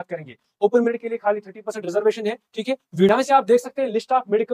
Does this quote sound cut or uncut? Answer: cut